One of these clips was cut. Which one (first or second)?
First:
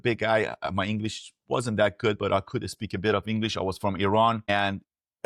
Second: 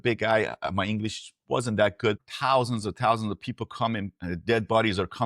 second